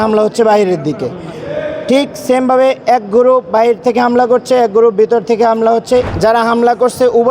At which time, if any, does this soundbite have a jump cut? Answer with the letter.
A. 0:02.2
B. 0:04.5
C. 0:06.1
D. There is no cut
C